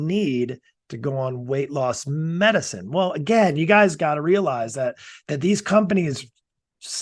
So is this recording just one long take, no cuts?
yes; 0 cuts

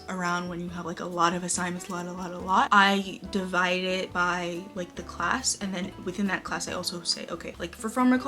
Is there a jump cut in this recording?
no; 0 cuts

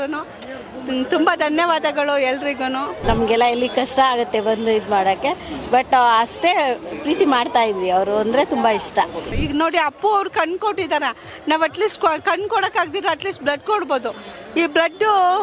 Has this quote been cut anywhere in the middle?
yes; 2 cuts; at 3.0 s, 9.4 s

